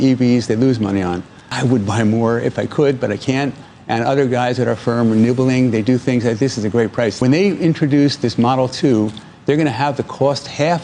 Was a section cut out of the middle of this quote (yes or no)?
yes